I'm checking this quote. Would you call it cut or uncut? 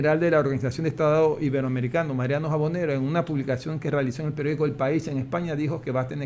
uncut